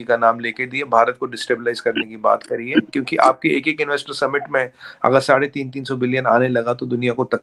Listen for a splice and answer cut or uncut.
uncut